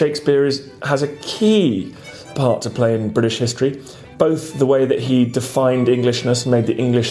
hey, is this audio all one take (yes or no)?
no